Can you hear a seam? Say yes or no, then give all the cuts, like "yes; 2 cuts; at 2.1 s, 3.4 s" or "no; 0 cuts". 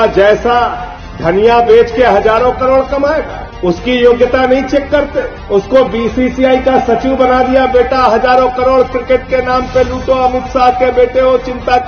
no; 0 cuts